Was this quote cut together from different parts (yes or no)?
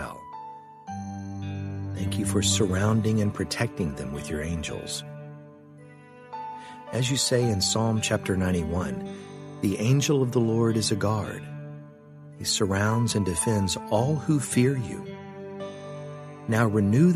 no